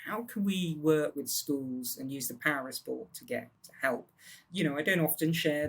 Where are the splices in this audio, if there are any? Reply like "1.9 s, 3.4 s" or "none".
1.2 s, 3.6 s, 4.4 s